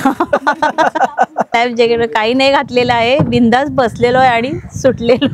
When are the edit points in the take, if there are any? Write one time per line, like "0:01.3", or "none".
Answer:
0:01.5